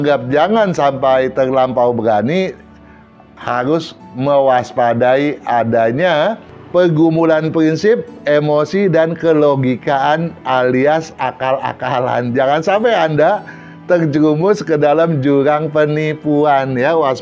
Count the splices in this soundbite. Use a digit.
0